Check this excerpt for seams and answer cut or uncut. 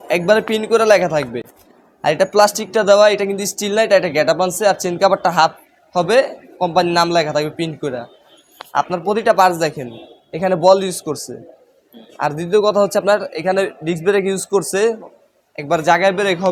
uncut